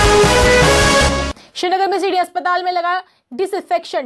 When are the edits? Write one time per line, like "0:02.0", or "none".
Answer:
0:01.2

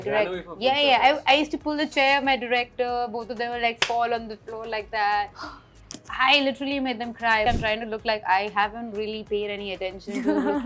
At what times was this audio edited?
0:07.5

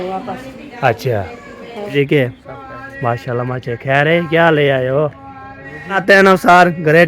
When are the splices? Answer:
0:02.1
0:06.0

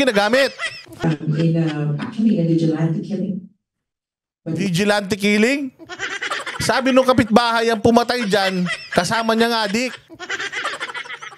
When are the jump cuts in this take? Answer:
0:01.0

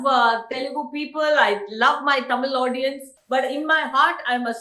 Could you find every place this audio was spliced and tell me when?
0:03.1

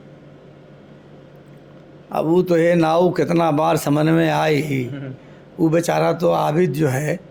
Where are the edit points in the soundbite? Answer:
none

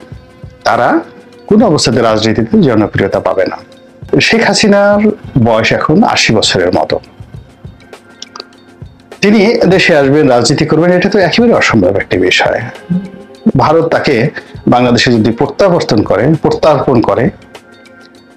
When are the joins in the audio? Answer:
0:04.0

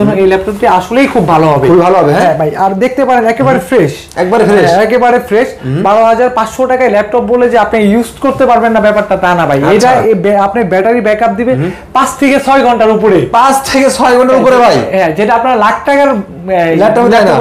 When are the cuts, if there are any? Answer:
none

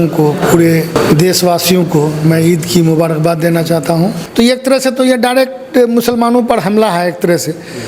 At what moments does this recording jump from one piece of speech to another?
0:00.9
0:04.2

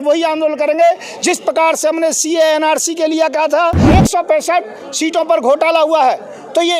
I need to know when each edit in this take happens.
0:03.9

